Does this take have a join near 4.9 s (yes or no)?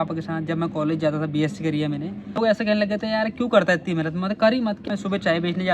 yes